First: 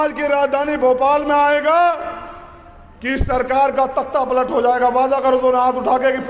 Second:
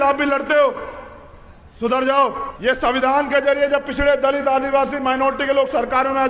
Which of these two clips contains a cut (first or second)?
second